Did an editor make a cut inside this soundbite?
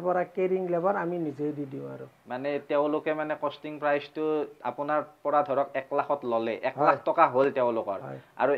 no; 0 cuts

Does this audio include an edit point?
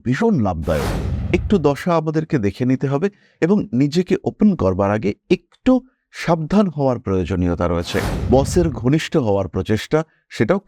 yes; 1 cut; at 8.1 s

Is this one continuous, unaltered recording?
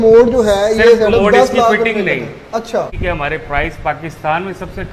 no; 1 cut; at 2.9 s

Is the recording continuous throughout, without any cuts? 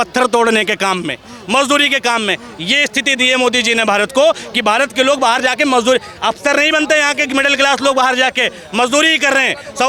yes; 0 cuts

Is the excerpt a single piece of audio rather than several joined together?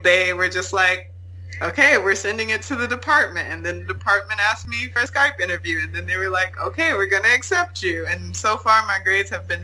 yes; 0 cuts

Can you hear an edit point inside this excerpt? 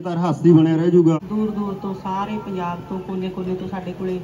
yes; 1 cut; at 1.2 s

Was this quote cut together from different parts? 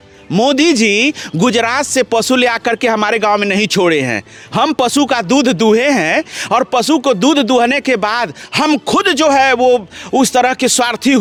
no; 0 cuts

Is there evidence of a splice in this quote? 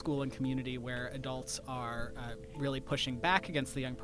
no; 0 cuts

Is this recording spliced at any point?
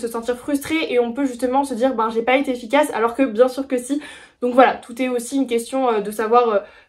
no; 0 cuts

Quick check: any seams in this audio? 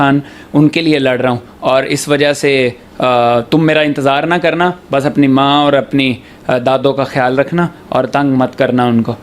no; 0 cuts

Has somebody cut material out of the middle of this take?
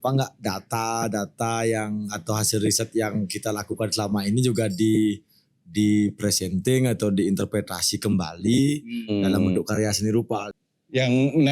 yes; 1 cut; at 10.6 s

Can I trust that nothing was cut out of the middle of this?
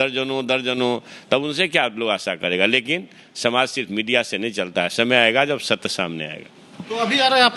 yes; 0 cuts

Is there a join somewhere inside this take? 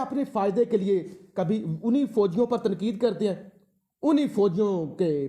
no; 0 cuts

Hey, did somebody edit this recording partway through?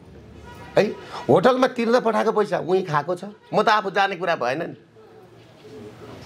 no; 0 cuts

